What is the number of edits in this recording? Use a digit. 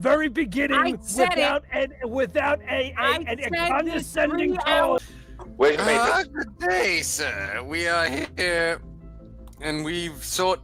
1